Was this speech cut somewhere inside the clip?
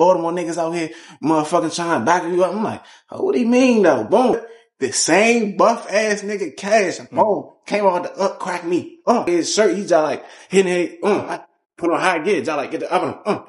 yes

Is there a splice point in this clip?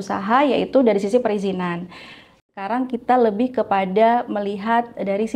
yes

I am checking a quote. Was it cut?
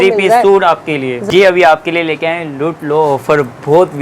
yes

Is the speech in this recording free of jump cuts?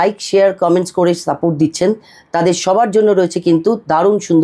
yes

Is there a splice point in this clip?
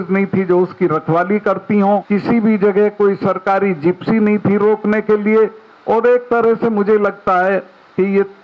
yes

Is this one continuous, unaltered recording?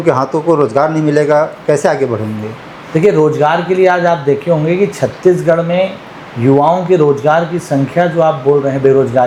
yes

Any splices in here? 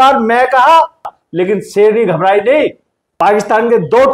yes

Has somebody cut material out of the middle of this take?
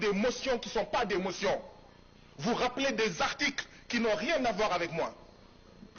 no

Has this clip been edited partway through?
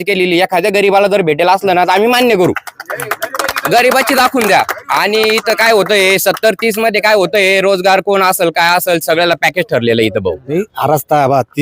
yes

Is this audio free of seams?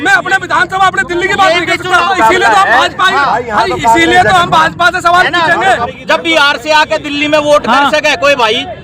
no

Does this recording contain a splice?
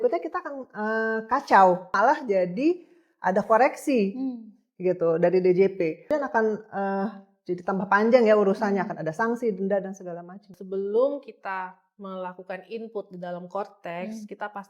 yes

